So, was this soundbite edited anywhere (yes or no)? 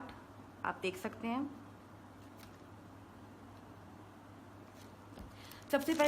no